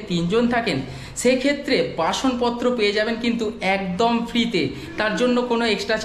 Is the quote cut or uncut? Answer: uncut